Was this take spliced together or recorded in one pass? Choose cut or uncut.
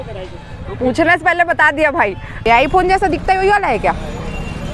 cut